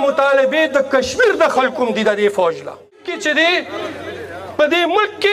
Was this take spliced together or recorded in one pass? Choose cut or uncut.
cut